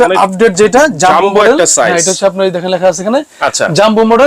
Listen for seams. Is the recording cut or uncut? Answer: uncut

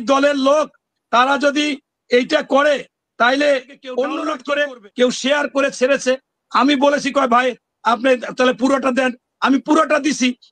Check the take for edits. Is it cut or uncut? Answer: cut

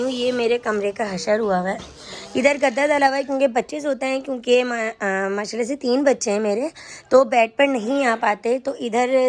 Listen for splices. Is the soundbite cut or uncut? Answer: uncut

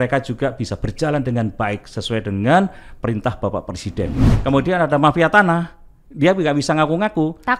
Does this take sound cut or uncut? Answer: cut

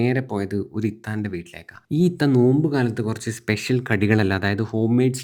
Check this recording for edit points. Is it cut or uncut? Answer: uncut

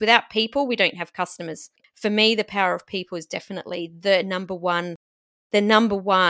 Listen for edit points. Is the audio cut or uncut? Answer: cut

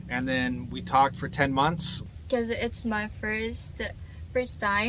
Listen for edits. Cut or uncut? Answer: cut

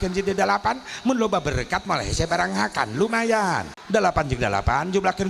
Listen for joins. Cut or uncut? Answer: cut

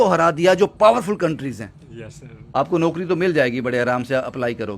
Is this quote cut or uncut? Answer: cut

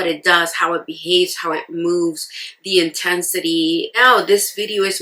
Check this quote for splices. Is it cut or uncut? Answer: cut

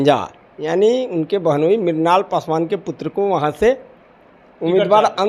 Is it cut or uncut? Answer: uncut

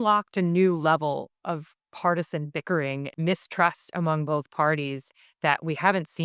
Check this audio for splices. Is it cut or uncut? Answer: cut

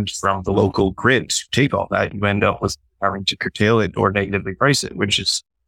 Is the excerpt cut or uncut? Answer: uncut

